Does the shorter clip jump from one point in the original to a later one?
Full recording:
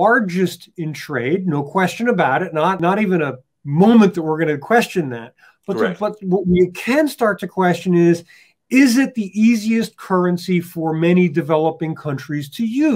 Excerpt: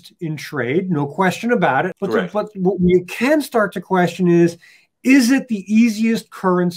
yes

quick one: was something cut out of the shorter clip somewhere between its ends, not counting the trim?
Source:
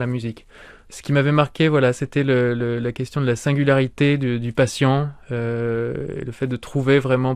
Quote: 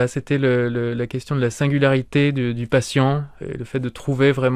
yes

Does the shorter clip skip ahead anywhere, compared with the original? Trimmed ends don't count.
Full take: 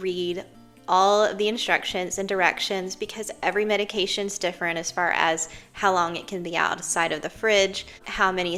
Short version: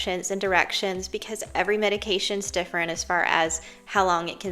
no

